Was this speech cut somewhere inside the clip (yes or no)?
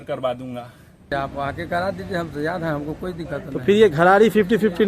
yes